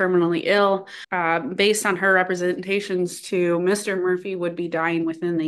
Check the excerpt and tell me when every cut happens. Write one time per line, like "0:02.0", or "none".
0:01.3

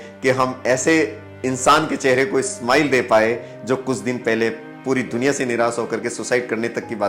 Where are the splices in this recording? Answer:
none

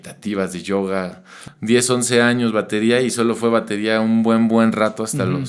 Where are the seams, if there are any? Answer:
0:01.4

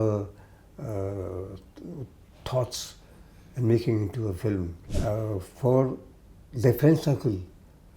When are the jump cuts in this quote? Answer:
0:04.8

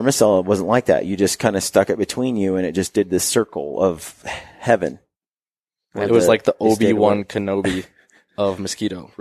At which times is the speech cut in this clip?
none

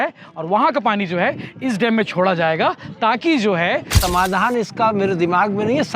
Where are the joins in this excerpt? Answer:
0:04.0

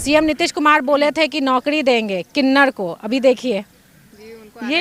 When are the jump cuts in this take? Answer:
none

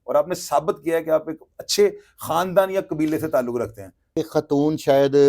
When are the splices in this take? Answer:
0:04.1

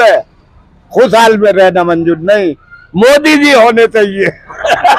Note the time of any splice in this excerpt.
none

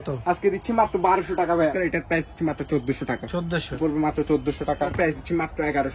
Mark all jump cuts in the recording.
0:01.8
0:03.7
0:04.9

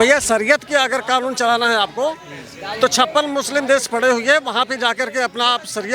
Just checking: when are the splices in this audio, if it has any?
none

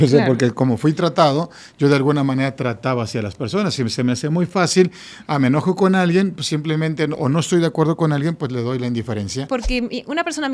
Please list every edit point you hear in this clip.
0:09.4

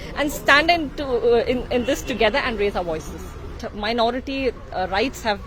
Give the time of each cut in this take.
0:03.7

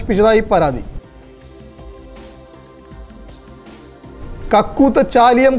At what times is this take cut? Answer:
0:01.0
0:04.5

